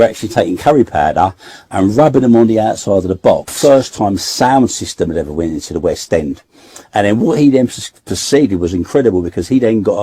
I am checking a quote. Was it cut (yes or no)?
yes